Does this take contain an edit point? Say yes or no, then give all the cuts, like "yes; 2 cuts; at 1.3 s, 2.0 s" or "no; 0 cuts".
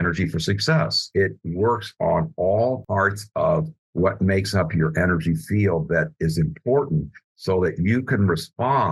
yes; 2 cuts; at 1.0 s, 2.8 s